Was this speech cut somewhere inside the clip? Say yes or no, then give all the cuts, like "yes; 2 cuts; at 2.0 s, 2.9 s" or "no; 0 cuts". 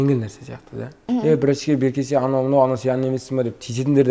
yes; 1 cut; at 1.0 s